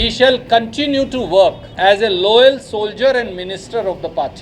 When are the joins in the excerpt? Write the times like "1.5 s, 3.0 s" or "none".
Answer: 1.7 s